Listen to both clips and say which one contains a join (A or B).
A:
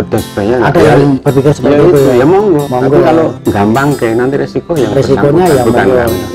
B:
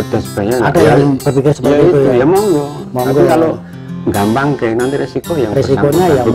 A